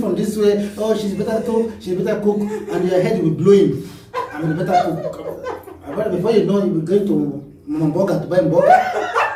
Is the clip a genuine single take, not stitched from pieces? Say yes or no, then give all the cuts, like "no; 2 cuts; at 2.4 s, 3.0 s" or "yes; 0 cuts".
yes; 0 cuts